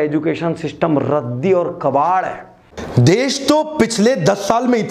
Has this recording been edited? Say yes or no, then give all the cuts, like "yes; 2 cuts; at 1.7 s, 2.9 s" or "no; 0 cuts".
yes; 1 cut; at 2.7 s